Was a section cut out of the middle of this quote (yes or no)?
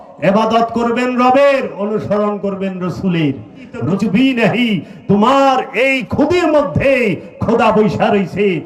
yes